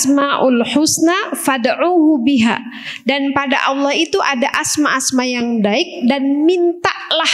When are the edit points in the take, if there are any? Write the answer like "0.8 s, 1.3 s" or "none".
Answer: none